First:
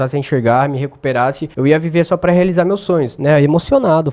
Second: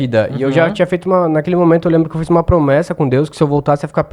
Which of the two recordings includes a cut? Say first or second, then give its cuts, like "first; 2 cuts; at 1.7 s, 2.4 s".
first; 2 cuts; at 1.5 s, 3.1 s